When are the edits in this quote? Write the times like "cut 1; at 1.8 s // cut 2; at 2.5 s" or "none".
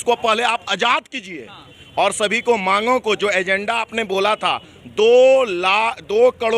none